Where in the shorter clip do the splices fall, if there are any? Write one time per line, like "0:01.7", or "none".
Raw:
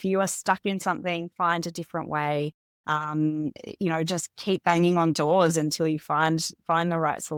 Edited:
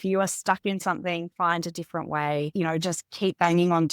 0:02.5